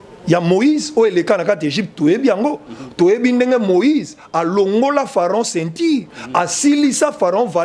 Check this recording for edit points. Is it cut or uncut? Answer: uncut